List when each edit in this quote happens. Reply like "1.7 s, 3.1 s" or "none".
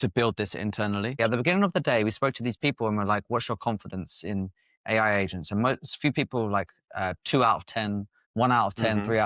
1.2 s, 8.1 s